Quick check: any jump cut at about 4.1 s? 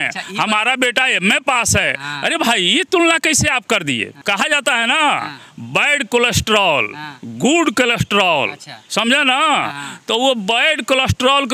yes; 1 cut; at 4.1 s

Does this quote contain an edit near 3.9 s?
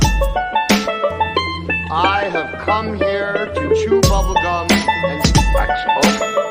no; 1 cut; at 1.3 s

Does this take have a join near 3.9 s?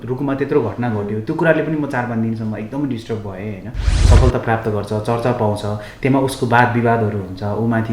yes; 1 cut; at 3.9 s

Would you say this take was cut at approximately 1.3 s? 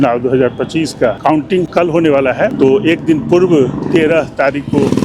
yes; 2 cuts; at 1.3 s, 2.5 s

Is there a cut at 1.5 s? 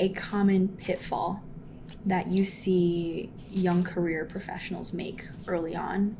no; 0 cuts

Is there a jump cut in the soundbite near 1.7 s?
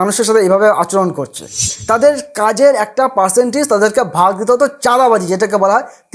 yes; 1 cut; at 1.7 s

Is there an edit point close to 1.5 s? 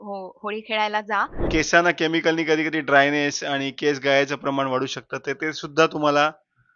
yes; 1 cut; at 1.5 s

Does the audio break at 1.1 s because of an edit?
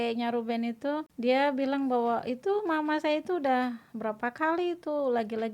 yes; 1 cut; at 1.1 s

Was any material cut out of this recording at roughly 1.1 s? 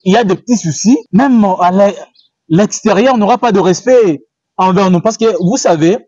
yes; 1 cut; at 1.1 s

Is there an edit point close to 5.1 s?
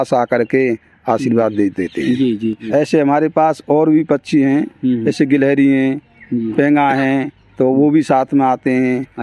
no; 1 cut; at 2.6 s

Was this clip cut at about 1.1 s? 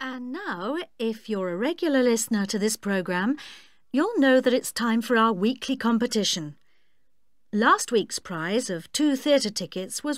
yes; 1 cut; at 1.1 s

